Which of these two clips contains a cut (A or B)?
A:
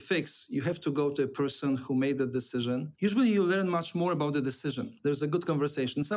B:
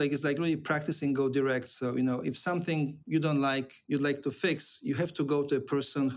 A